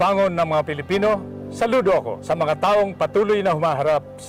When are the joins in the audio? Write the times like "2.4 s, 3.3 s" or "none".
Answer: none

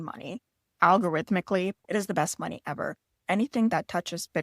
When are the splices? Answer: 1.8 s

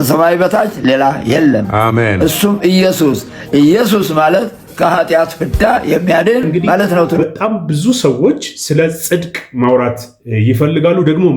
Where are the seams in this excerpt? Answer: 7.2 s

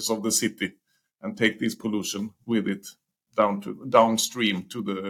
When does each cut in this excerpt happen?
none

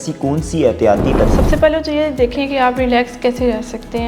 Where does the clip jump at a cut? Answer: 1.3 s

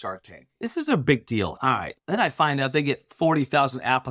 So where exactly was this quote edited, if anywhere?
1.7 s, 3.1 s

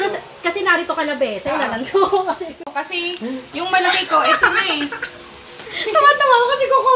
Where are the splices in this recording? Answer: 2.7 s

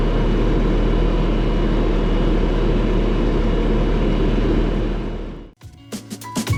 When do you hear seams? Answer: none

